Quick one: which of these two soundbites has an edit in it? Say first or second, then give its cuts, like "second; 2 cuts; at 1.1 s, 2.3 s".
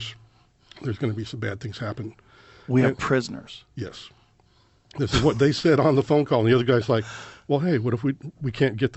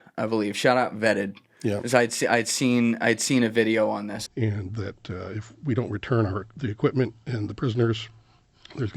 second; 1 cut; at 4.2 s